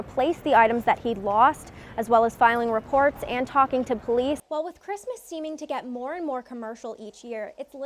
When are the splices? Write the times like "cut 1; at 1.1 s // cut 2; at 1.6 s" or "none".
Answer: cut 1; at 4.4 s